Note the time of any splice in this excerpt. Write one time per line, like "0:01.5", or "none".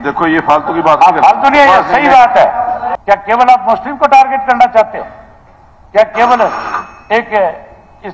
0:02.9